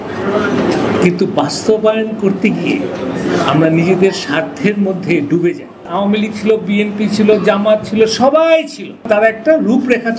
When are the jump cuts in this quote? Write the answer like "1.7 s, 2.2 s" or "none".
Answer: 5.8 s, 9.0 s